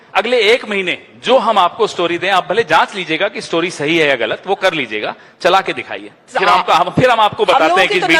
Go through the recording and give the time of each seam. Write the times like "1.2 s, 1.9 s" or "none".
none